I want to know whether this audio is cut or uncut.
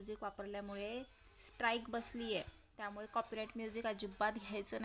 uncut